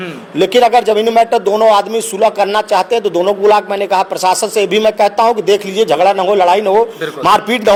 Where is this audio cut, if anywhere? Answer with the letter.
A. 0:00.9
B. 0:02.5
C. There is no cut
C